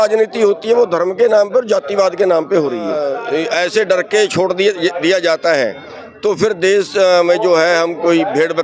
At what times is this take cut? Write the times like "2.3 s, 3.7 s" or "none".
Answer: 3.1 s